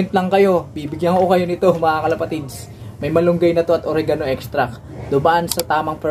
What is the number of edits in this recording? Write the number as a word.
zero